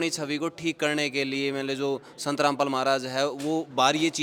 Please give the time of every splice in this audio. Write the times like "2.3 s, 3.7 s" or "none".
none